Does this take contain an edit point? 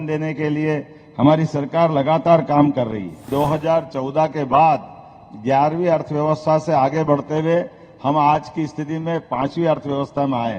yes; 1 cut; at 3.3 s

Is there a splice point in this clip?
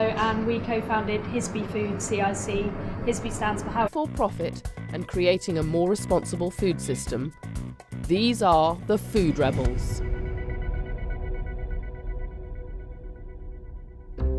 no; 0 cuts

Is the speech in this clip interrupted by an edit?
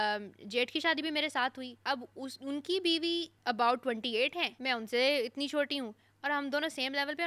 yes; 3 cuts; at 1.7 s, 3.3 s, 4.5 s

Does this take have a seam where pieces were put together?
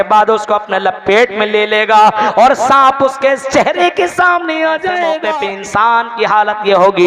yes; 1 cut; at 5.2 s

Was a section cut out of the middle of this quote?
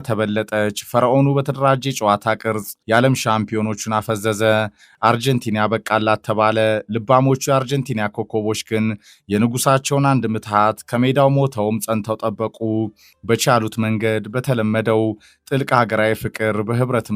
yes; 2 cuts; at 2.7 s, 4.9 s

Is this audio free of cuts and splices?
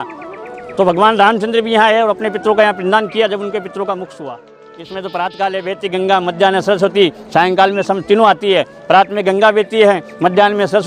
no; 1 cut; at 5.0 s

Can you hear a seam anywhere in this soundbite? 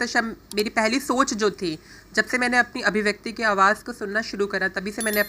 no; 0 cuts

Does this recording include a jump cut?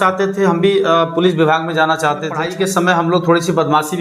yes; 1 cut; at 2.4 s

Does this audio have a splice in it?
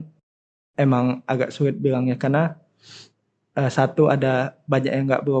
no; 0 cuts

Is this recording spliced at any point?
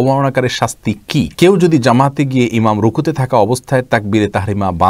yes; 1 cut; at 1.3 s

